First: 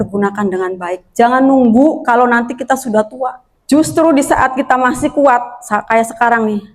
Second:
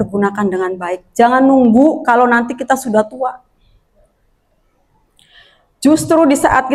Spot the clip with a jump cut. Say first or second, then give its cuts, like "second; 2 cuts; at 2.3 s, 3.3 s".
first; 1 cut; at 3.5 s